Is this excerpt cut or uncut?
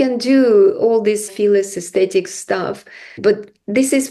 cut